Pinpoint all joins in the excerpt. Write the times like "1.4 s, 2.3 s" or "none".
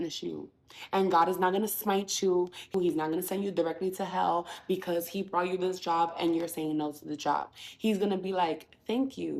2.7 s